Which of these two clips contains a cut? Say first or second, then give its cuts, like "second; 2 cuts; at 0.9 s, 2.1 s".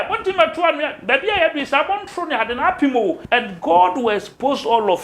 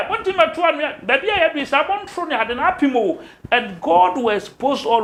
first; 1 cut; at 3.2 s